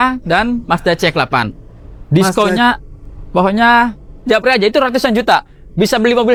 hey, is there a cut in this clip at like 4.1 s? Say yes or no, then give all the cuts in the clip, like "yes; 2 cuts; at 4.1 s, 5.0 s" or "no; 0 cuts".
no; 0 cuts